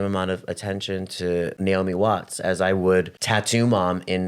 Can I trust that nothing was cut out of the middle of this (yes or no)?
no